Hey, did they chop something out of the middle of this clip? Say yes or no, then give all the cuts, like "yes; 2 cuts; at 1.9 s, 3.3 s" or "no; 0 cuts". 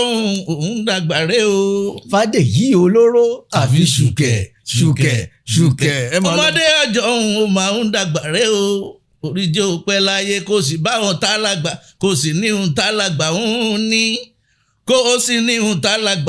no; 0 cuts